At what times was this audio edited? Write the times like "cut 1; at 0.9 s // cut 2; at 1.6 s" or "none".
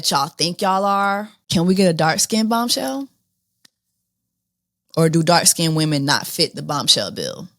cut 1; at 1.4 s